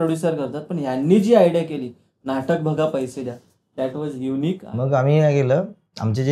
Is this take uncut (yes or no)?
no